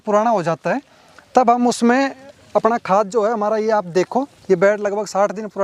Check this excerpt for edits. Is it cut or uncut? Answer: uncut